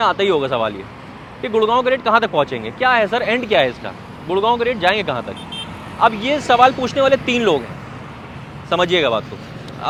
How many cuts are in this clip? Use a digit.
0